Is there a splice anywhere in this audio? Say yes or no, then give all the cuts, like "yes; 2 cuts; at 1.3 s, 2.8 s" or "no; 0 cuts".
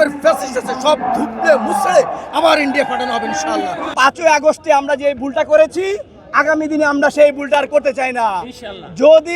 yes; 1 cut; at 3.9 s